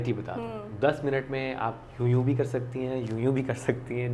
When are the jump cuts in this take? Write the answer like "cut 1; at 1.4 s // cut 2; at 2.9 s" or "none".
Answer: none